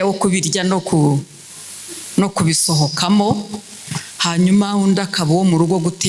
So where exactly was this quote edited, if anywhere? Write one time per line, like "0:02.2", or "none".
none